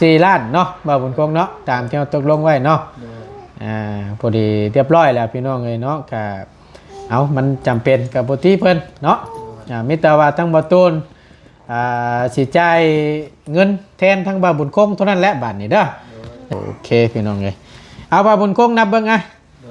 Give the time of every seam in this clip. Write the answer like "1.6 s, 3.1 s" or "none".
16.4 s